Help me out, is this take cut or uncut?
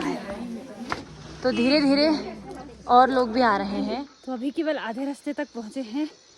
cut